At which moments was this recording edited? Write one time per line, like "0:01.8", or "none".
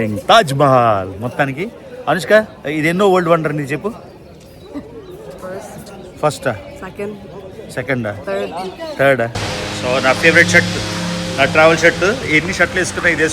0:09.5